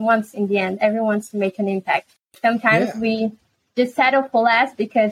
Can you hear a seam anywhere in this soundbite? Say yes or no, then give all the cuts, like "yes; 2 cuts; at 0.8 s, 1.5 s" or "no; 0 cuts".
no; 0 cuts